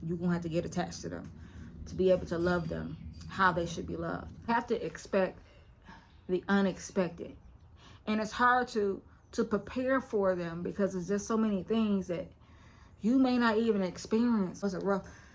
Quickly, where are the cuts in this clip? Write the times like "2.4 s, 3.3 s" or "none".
4.5 s, 14.6 s